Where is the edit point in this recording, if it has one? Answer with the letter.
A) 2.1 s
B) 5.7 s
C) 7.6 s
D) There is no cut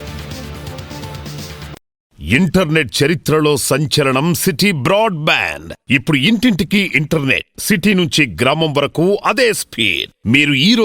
A